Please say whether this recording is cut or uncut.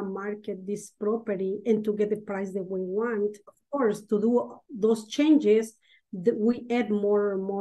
cut